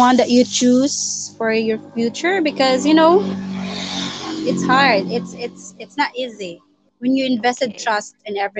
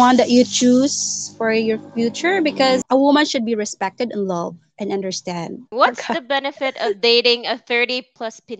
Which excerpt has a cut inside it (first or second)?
second